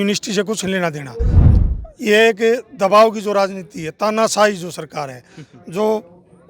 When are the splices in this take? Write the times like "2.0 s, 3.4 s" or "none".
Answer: 1.4 s